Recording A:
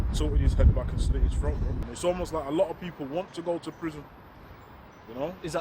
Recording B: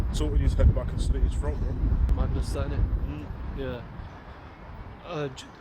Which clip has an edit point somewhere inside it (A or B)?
A